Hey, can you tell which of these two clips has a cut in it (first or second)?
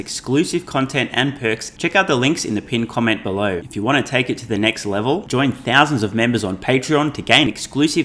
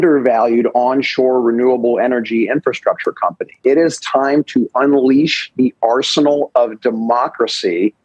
first